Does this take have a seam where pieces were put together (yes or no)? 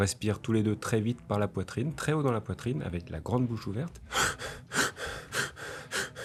no